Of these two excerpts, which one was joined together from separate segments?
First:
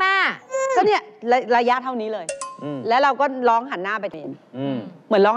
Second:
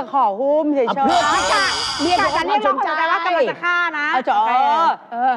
first; 1 cut; at 4.2 s

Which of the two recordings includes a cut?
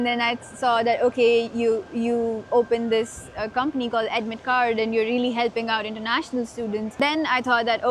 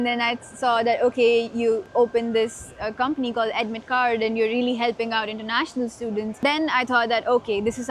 second; 1 cut; at 1.8 s

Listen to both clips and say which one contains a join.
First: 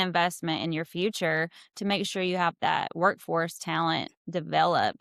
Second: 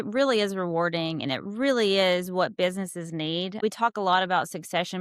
second; 1 cut; at 3.6 s

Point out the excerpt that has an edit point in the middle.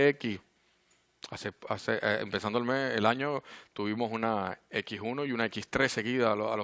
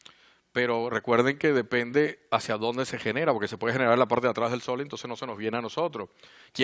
second; 1 cut; at 1.5 s

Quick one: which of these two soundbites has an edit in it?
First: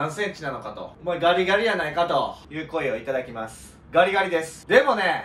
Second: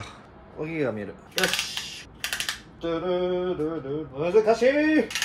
second; 1 cut; at 4.1 s

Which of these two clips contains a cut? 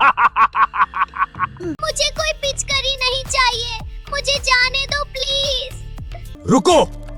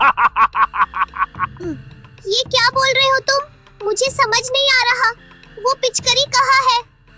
first; 2 cuts; at 1.8 s, 6.2 s

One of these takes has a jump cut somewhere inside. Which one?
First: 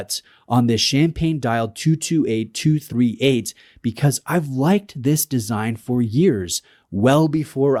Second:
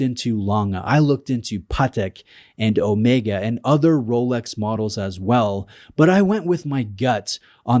second; 1 cut; at 1.2 s

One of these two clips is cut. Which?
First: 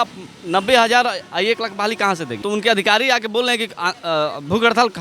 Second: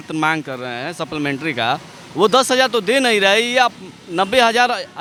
first; 1 cut; at 2.4 s

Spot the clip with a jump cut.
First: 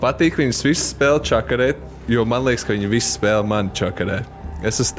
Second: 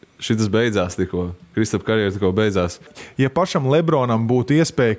second; 1 cut; at 3.0 s

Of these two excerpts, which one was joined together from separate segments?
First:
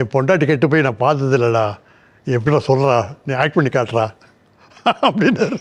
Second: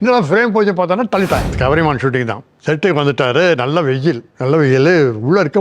second; 3 cuts; at 1.5 s, 2.5 s, 4.3 s

